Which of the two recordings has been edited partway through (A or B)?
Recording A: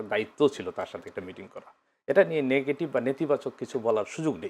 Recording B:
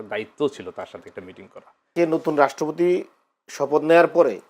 B